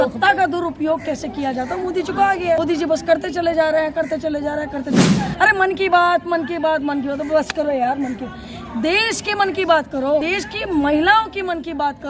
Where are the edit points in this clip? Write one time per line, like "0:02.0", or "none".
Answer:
0:02.6
0:10.2